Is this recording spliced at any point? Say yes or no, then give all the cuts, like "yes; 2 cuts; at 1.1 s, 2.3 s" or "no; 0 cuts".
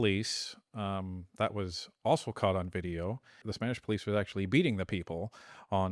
yes; 1 cut; at 3.5 s